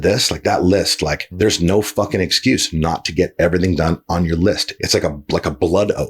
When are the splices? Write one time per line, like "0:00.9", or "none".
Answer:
0:01.2
0:04.7

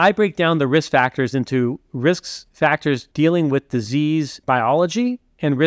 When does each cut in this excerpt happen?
0:02.7
0:04.3

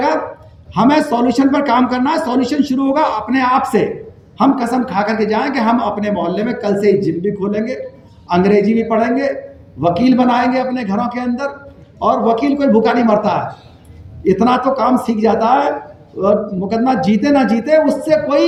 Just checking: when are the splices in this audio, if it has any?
none

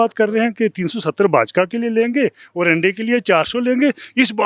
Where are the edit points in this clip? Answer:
none

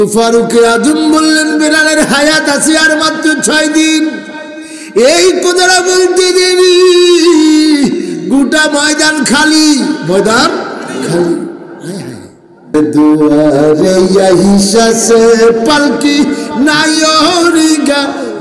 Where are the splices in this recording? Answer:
0:12.7

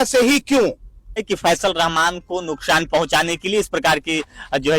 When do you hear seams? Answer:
0:01.2

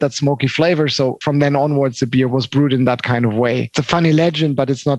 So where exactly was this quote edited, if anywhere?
0:01.2
0:02.3
0:03.7

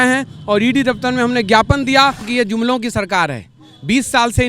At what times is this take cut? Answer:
0:02.2

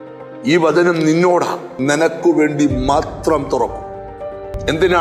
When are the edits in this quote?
0:01.7

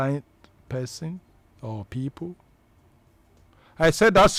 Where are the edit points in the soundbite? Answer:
none

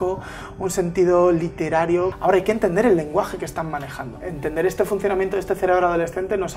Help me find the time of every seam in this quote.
0:02.1
0:04.2

